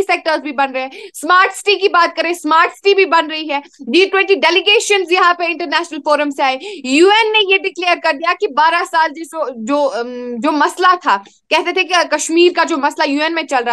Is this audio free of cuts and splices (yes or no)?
yes